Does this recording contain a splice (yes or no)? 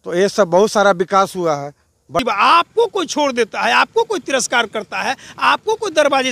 yes